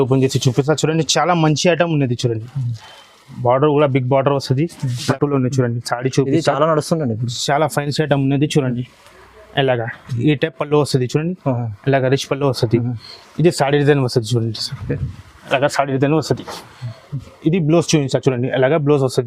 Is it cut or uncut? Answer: cut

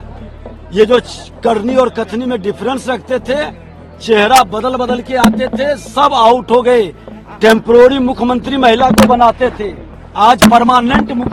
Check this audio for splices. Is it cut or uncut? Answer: uncut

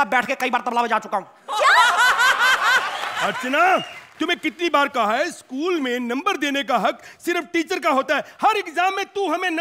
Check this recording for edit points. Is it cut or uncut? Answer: cut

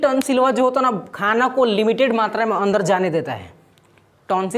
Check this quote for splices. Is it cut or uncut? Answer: uncut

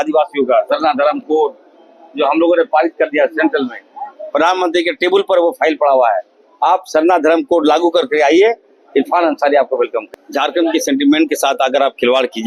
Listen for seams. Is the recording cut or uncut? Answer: cut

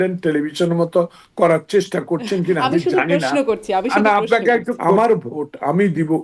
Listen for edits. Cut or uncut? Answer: cut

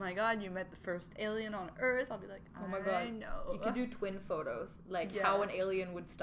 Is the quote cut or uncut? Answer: uncut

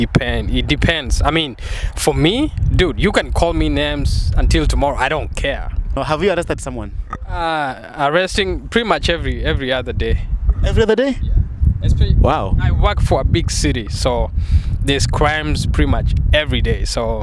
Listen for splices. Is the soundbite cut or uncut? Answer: cut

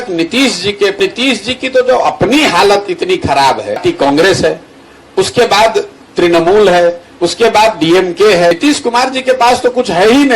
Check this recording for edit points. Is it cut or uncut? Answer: cut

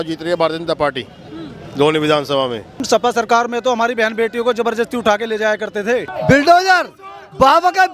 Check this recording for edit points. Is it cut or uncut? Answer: cut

